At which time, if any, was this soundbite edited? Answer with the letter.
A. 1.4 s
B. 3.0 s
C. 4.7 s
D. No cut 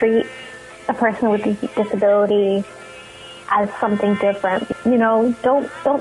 C